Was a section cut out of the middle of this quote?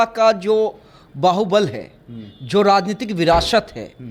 no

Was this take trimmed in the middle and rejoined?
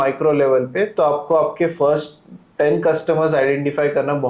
no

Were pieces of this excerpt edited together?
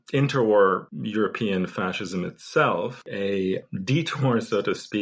yes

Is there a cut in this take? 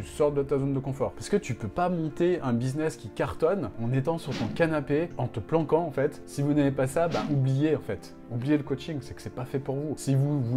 yes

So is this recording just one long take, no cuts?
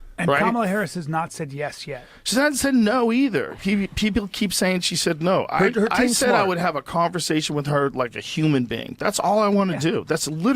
no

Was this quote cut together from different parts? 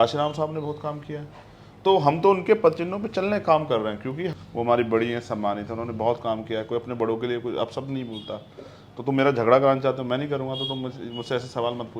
yes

